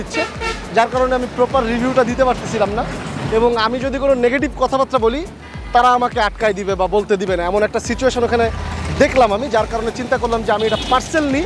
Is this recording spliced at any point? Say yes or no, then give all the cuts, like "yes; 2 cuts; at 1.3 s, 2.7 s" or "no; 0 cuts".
no; 0 cuts